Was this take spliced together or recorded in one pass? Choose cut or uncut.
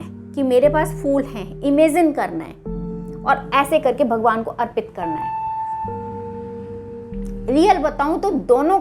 cut